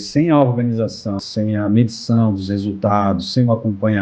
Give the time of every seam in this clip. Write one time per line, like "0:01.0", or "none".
0:01.2